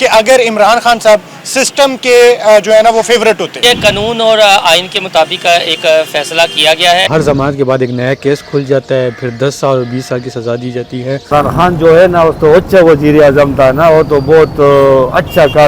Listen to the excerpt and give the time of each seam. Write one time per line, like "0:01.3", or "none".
0:03.6
0:07.1
0:11.2

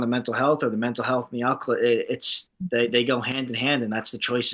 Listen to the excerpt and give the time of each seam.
none

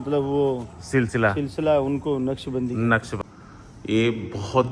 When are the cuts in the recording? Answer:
0:03.2

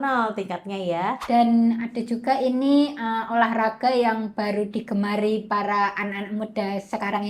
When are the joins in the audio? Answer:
0:01.2

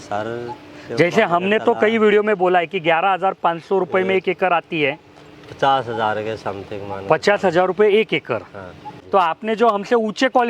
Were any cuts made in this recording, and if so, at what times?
0:08.9

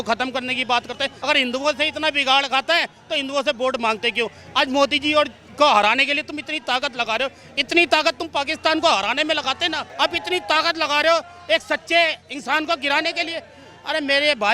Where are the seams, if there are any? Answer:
0:01.1
0:09.8

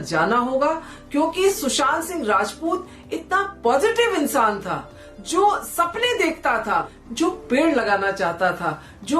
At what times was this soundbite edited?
0:07.0

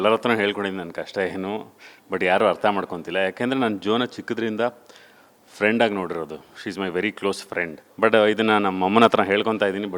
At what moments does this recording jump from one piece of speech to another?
0:07.8

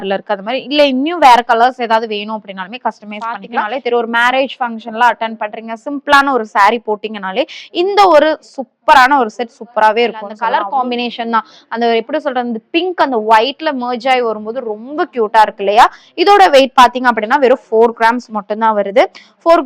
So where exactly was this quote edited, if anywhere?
0:03.3
0:10.3

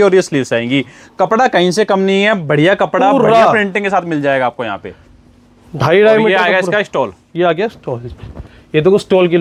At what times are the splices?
none

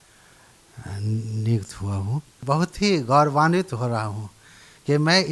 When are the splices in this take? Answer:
0:02.3

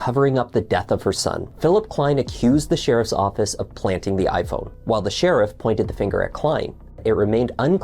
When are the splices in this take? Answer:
0:01.5
0:04.7
0:07.0

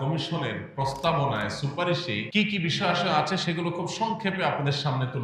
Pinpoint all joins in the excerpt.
0:02.2

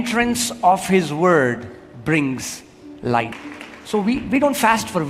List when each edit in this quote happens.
0:03.4

